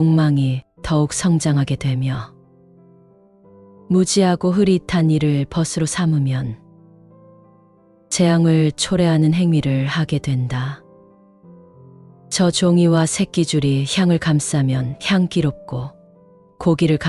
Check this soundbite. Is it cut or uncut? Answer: cut